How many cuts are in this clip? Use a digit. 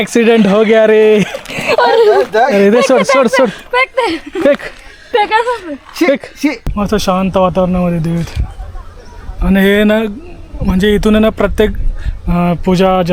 1